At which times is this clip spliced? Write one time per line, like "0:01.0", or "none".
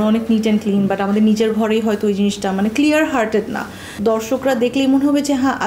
0:03.9